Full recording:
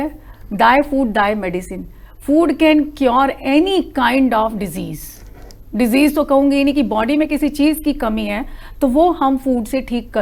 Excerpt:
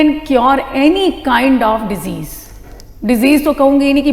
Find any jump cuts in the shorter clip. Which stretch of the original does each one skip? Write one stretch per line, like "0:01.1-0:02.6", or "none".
none

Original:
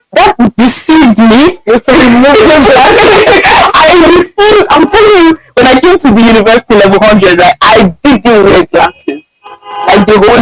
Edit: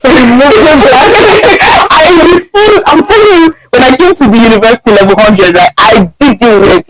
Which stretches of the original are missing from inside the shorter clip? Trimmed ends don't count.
none

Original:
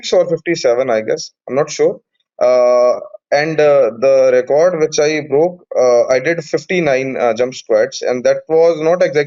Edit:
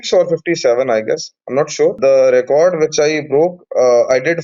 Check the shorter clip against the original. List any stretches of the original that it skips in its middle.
0:02.0-0:04.0

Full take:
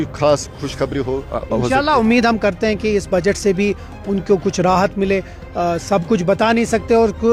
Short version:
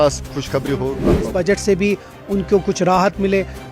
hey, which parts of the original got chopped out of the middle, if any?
0:01.5-0:03.0

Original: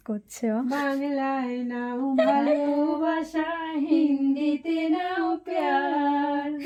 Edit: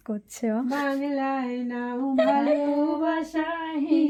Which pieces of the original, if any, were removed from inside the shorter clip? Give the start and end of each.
none

